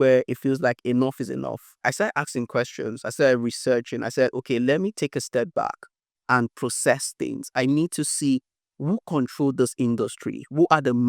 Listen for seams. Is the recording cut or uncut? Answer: cut